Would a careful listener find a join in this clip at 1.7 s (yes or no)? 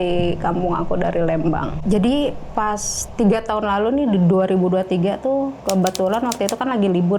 yes